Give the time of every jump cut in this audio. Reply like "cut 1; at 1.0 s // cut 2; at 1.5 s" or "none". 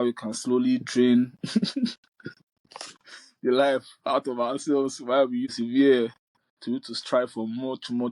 cut 1; at 5.5 s